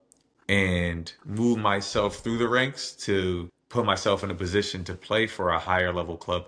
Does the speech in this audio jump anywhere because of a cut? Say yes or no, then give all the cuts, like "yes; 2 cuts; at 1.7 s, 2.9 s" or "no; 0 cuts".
yes; 1 cut; at 3.5 s